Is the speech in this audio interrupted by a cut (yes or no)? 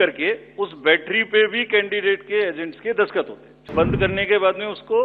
yes